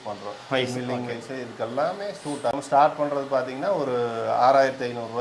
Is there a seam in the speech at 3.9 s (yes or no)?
no